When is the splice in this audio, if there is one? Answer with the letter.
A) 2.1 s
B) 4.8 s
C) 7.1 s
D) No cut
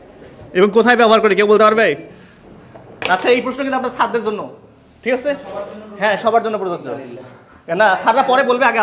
A